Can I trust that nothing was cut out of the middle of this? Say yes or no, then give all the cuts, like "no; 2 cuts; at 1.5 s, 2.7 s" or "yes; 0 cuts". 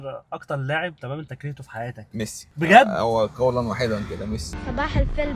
no; 1 cut; at 4.4 s